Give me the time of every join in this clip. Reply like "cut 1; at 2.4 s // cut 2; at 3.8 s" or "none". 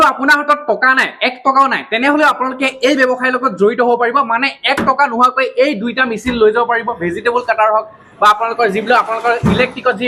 none